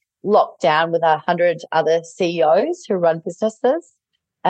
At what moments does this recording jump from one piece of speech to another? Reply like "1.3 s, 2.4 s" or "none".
none